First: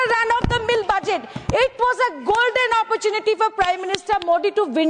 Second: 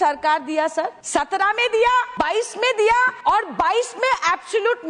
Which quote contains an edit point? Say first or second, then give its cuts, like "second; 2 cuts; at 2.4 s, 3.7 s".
second; 3 cuts; at 1.0 s, 2.1 s, 3.1 s